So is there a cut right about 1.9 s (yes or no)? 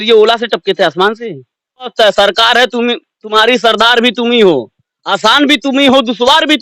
yes